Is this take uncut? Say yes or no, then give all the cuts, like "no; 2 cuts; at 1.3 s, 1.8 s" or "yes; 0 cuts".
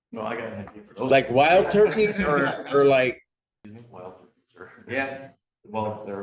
no; 1 cut; at 3.4 s